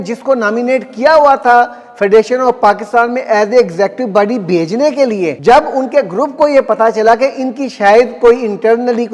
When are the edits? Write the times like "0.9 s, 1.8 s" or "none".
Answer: 5.4 s